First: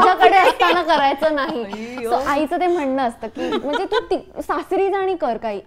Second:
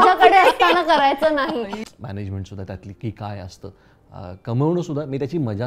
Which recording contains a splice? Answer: second; 1 cut; at 1.8 s

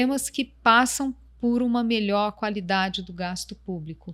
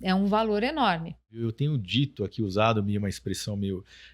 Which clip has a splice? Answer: second; 1 cut; at 1.4 s

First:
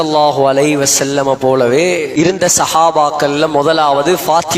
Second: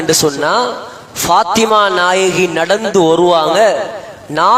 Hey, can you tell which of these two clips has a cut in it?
first; 1 cut; at 2.1 s

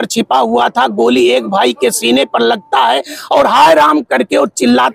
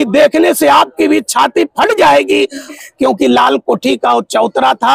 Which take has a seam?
second; 1 cut; at 2.7 s

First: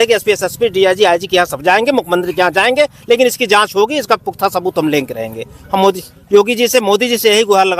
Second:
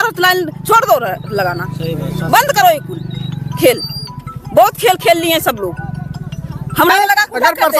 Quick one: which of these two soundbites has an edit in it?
second; 1 cut; at 6.9 s

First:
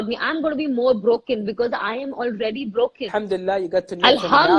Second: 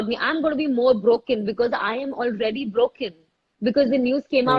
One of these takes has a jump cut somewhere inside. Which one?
first; 1 cut; at 3.0 s

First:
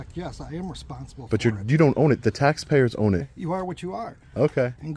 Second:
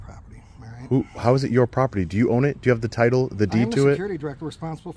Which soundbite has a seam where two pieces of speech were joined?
first; 1 cut; at 3.3 s

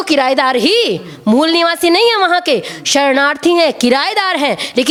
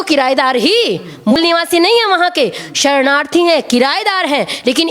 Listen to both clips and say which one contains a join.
second; 1 cut; at 1.3 s

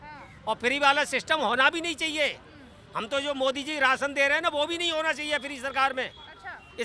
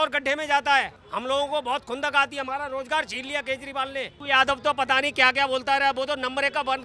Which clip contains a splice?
second; 2 cuts; at 1.0 s, 4.1 s

